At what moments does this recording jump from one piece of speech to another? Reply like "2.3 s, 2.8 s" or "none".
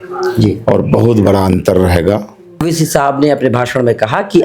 2.6 s

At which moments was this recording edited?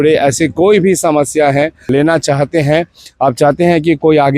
1.9 s

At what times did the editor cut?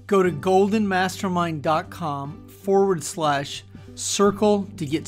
none

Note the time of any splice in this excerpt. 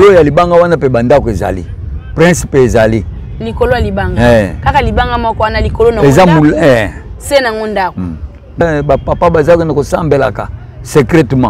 8.6 s

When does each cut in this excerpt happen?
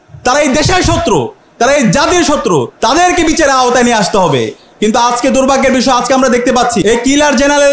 2.7 s, 6.8 s

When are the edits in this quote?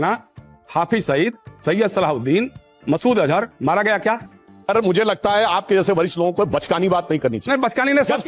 4.7 s

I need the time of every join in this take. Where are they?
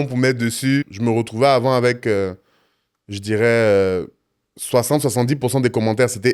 0.9 s

